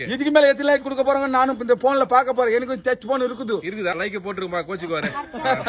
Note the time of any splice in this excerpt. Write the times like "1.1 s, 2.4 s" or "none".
4.0 s